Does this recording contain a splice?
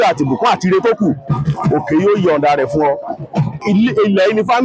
yes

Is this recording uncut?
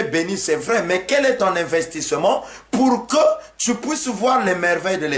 yes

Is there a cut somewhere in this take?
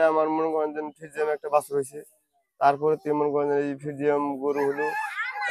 no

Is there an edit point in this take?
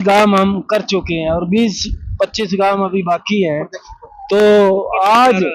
no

